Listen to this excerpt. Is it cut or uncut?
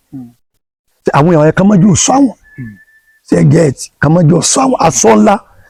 uncut